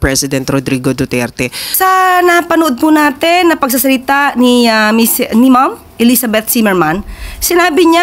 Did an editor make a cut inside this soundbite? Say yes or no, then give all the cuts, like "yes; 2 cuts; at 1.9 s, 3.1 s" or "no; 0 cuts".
yes; 1 cut; at 1.6 s